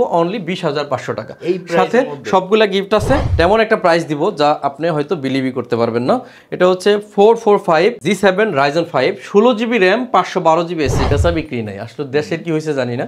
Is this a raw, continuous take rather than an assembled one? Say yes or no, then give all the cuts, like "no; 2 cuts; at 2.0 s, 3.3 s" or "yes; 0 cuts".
no; 2 cuts; at 3.3 s, 11.0 s